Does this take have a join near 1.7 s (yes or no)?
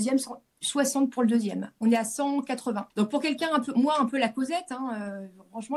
yes